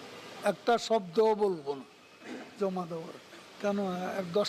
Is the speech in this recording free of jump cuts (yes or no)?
no